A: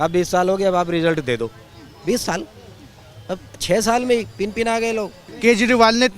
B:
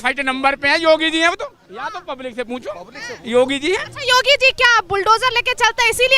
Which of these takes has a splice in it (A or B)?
A